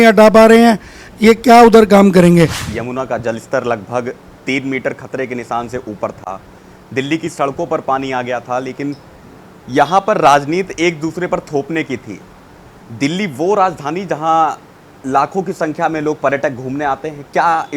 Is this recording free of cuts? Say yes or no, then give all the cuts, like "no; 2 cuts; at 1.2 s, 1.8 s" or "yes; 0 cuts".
no; 1 cut; at 2.6 s